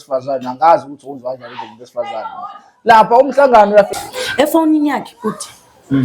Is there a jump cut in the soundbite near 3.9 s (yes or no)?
yes